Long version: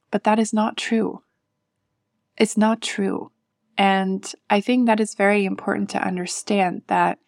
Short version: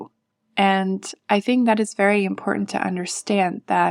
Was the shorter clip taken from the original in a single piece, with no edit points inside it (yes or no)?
yes